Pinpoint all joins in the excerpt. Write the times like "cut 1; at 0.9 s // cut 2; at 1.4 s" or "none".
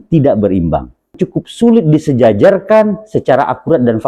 cut 1; at 1.2 s